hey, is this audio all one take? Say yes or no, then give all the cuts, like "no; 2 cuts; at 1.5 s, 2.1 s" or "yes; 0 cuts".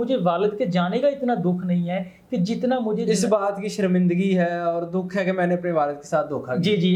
yes; 0 cuts